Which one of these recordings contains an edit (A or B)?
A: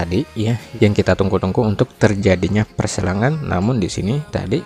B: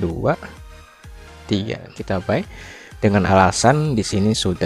B